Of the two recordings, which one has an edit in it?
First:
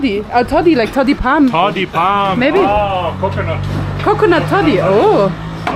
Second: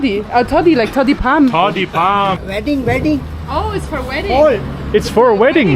second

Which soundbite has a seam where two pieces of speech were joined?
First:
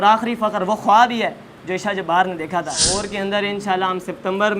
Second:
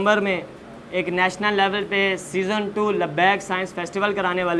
first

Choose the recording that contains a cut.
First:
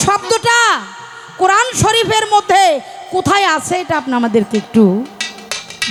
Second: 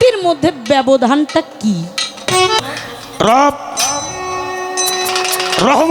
second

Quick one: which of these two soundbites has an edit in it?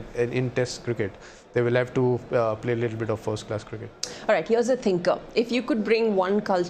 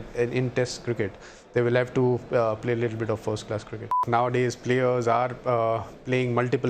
second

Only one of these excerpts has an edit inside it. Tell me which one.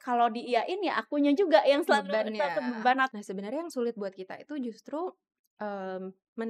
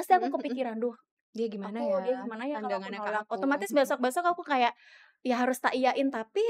first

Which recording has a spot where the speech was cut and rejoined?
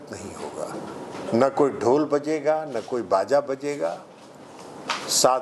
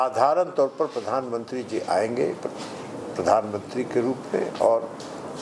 first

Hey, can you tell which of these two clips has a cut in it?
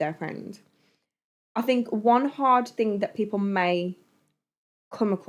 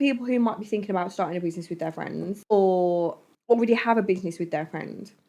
second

